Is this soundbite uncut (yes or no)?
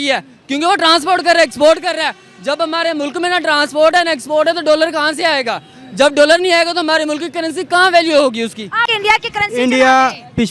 no